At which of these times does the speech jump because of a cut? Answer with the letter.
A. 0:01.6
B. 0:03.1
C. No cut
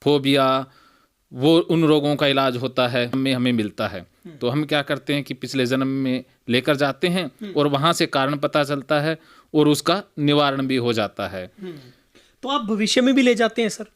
B